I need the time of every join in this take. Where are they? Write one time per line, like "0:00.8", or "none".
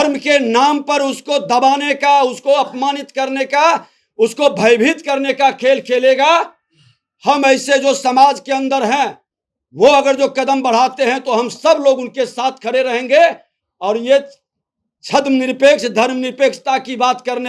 none